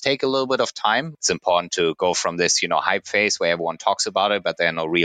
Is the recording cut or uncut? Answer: cut